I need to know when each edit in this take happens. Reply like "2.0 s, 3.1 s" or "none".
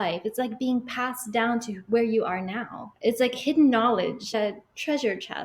4.3 s